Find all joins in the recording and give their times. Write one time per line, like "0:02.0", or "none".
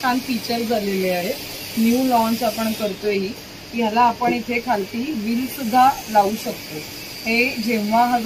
none